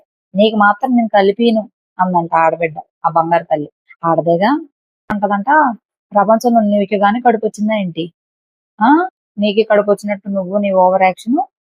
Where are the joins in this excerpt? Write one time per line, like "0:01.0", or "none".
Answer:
0:05.2